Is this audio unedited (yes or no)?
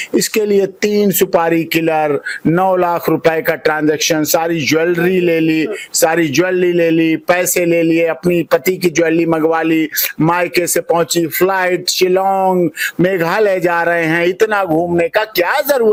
yes